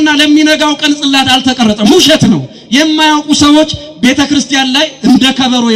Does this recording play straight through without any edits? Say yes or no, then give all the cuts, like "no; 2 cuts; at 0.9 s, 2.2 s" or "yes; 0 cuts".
yes; 0 cuts